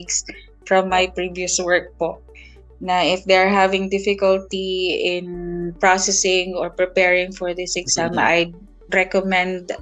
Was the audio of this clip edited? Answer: no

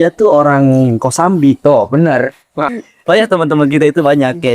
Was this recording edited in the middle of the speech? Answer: yes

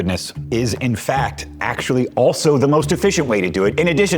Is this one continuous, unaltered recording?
yes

